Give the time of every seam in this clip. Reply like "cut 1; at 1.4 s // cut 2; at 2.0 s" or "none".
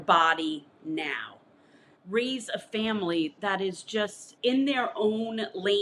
cut 1; at 2.0 s // cut 2; at 4.2 s